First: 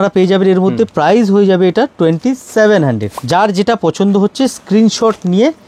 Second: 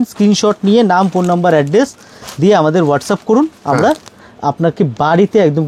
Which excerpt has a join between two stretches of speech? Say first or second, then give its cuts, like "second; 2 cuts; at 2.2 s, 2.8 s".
first; 2 cuts; at 0.9 s, 3.1 s